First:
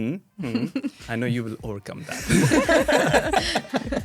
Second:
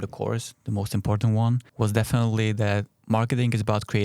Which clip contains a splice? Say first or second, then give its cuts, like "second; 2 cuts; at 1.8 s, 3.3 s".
second; 2 cuts; at 1.7 s, 2.9 s